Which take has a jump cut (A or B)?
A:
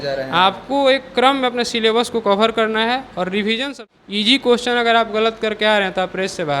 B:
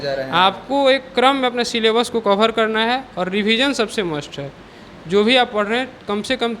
A